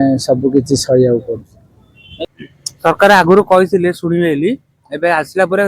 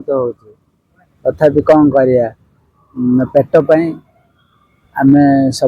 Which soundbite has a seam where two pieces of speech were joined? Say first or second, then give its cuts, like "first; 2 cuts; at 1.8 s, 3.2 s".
first; 1 cut; at 2.0 s